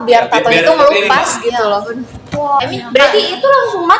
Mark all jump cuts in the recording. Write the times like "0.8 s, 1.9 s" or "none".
2.6 s